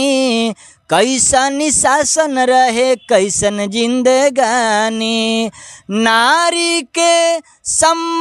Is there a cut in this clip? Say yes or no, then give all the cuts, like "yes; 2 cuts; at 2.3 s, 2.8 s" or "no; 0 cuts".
no; 0 cuts